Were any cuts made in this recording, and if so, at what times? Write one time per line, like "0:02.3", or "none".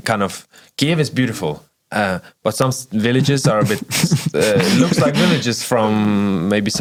none